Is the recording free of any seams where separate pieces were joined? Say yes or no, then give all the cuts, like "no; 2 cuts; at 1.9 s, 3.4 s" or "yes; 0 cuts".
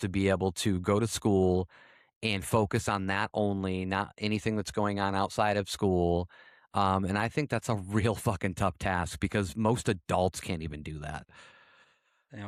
yes; 0 cuts